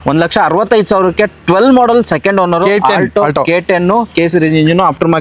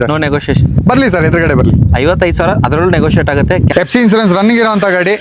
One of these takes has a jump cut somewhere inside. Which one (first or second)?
second